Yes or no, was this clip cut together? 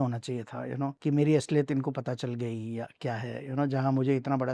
yes